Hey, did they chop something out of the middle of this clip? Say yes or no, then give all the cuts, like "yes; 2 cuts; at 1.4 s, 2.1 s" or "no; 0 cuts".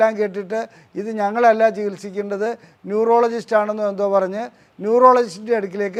no; 0 cuts